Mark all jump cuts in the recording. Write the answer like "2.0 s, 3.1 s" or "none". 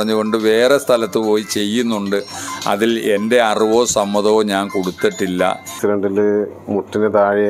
5.7 s